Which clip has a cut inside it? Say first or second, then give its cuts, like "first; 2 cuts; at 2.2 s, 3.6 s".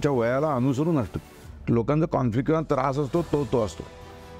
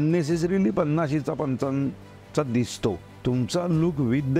second; 1 cut; at 3.1 s